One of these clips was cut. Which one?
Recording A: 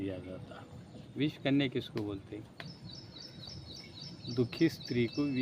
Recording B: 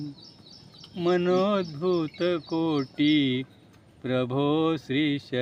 A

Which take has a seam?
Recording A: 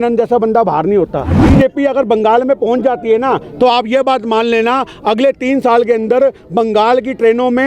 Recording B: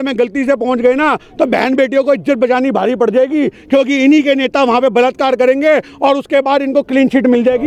A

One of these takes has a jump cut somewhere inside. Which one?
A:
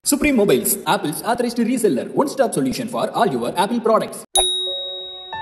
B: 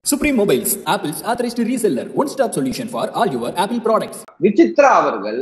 B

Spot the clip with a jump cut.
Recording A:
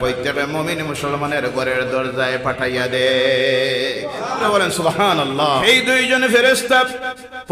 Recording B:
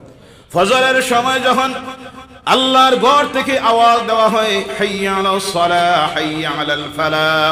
A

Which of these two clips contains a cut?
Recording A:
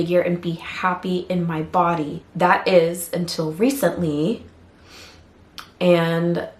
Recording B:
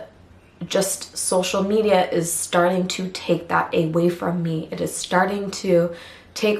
A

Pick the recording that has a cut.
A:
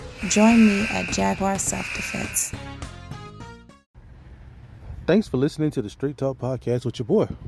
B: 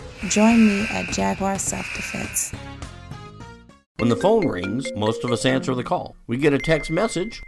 B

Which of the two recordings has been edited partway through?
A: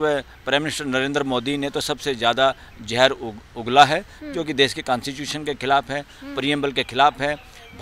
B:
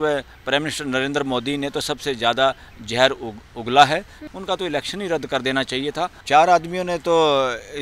B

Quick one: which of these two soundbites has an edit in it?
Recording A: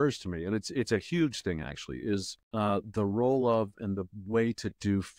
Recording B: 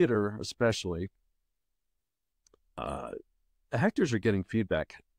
A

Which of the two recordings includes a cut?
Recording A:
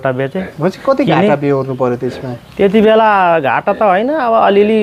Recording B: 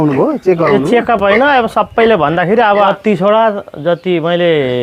B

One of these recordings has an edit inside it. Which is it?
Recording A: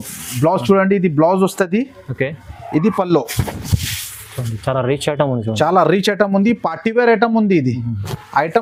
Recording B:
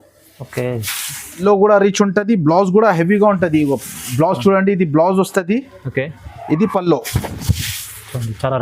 B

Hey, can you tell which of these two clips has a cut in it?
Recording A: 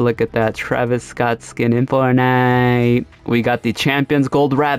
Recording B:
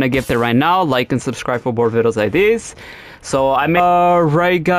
B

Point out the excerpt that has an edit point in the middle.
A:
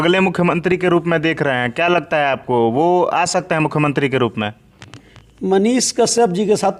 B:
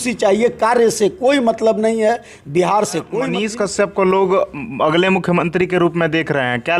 B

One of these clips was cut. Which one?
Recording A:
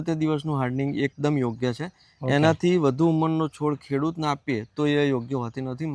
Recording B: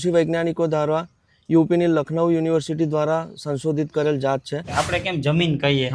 B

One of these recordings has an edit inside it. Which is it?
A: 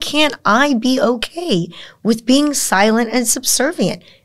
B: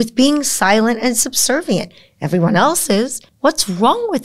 B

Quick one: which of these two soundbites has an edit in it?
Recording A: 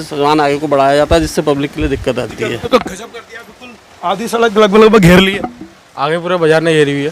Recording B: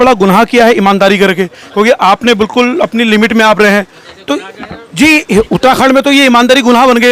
A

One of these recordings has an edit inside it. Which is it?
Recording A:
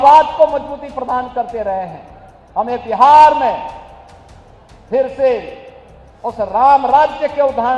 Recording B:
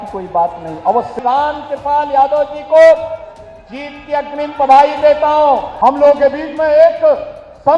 B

